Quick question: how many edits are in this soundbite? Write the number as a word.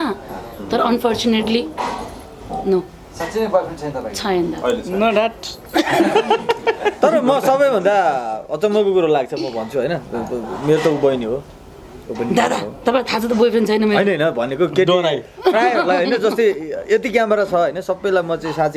zero